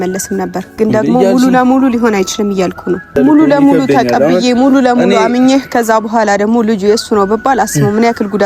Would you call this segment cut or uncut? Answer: cut